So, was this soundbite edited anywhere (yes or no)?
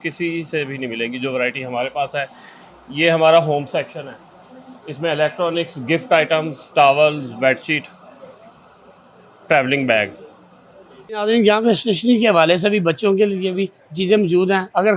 no